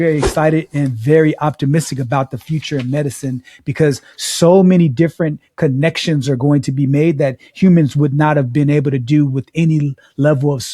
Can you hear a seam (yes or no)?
no